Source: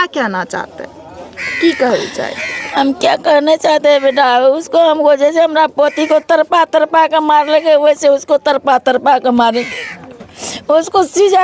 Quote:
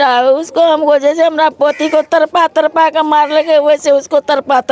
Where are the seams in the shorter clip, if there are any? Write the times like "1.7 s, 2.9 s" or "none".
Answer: none

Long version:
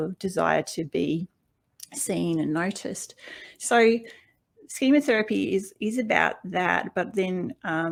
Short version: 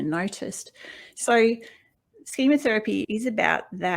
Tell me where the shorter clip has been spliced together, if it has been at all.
3.0 s

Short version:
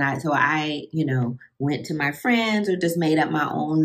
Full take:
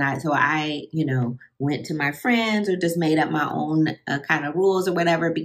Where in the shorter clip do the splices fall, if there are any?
none

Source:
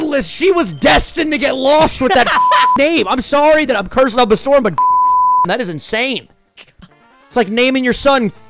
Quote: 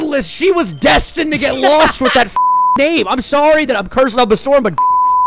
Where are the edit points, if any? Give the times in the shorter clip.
none

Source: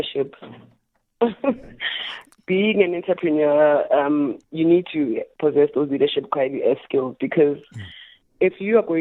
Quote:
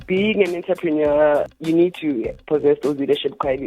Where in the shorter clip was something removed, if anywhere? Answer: 1.5 s

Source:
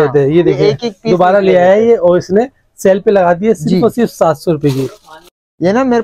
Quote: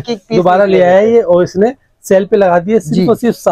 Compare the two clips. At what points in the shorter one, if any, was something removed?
none

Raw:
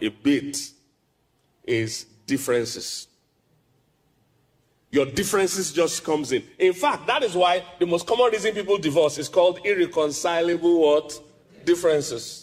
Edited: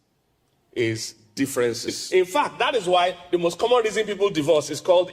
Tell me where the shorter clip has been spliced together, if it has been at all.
2.0 s

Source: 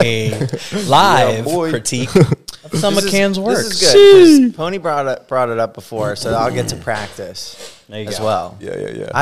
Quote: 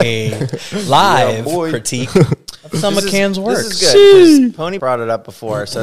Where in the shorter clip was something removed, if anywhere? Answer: 4.8 s

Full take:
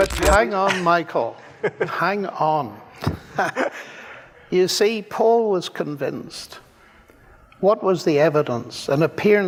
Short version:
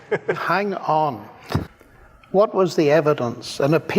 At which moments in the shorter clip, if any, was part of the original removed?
1.7 s

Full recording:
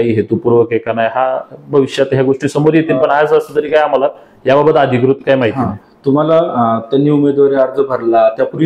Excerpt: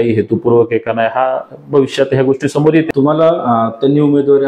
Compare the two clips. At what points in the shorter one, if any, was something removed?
2.9 s

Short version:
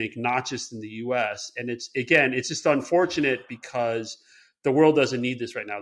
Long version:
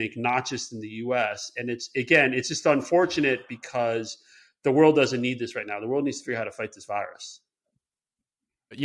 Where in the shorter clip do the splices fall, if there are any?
none

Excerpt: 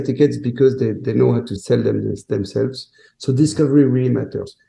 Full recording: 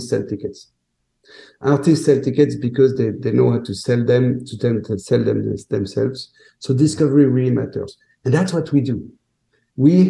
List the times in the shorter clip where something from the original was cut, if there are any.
1.5 s

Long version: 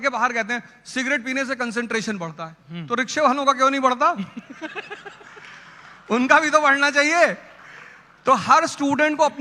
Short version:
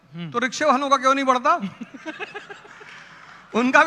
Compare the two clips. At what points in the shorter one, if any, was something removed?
none

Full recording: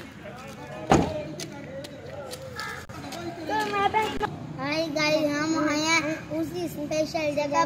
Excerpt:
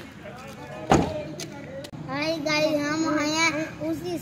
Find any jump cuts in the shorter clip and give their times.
1.9 s

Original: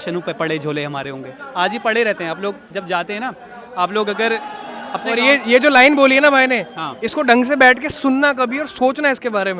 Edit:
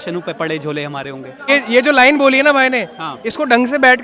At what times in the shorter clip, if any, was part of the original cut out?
1.5 s

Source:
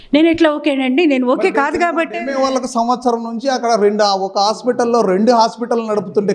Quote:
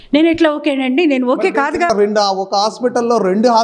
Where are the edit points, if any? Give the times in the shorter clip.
1.9 s

